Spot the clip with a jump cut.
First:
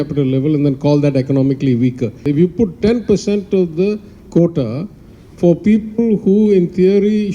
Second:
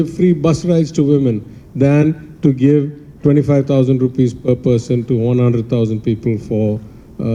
first; 1 cut; at 2.2 s

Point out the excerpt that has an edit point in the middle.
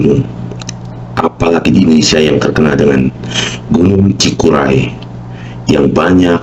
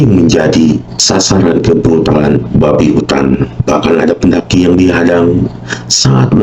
second; 2 cuts; at 0.9 s, 3.5 s

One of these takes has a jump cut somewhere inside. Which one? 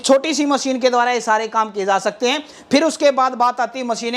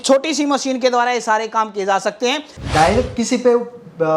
second; 1 cut; at 2.5 s

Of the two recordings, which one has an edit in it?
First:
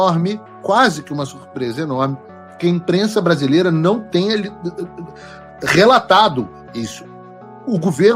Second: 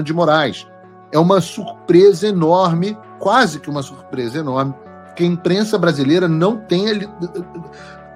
first; 1 cut; at 7.0 s

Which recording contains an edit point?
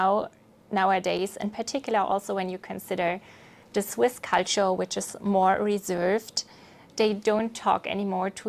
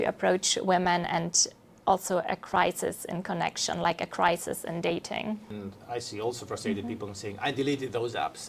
second; 1 cut; at 5.5 s

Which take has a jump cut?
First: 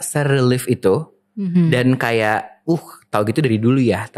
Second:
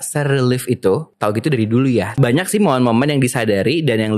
second; 2 cuts; at 1.1 s, 2.2 s

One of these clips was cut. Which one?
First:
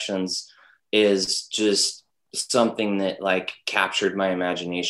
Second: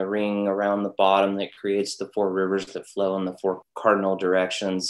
second; 1 cut; at 3.6 s

